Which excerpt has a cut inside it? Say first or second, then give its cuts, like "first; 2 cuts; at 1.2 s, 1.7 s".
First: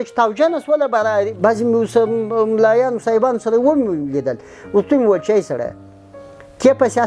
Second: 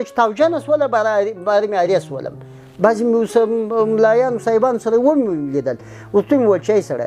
first; 1 cut; at 1.3 s